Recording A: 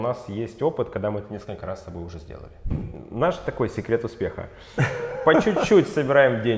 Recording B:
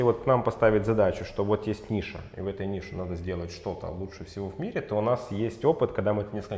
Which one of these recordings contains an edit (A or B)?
A